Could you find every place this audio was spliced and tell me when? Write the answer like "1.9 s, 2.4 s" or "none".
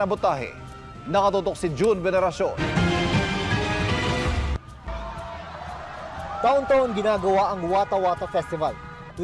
3.2 s